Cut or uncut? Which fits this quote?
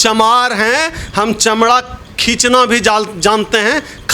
uncut